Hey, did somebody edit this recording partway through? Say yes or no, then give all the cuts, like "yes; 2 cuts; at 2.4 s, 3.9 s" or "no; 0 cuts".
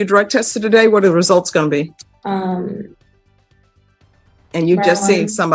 no; 0 cuts